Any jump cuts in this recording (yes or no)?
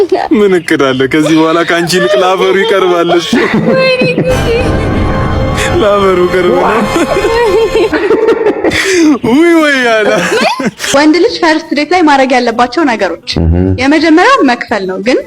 yes